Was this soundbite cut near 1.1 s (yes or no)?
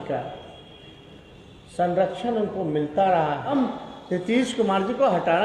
no